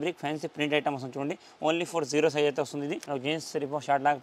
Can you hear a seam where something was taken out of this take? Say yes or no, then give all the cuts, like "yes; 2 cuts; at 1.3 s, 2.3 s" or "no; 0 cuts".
yes; 1 cut; at 3.0 s